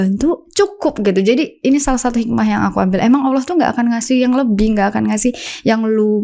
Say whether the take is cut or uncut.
uncut